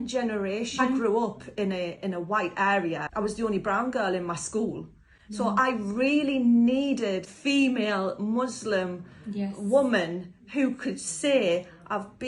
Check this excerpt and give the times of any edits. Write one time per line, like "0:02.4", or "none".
0:01.0
0:03.1
0:07.3